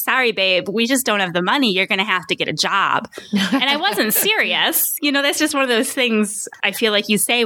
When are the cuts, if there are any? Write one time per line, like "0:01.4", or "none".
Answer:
0:06.5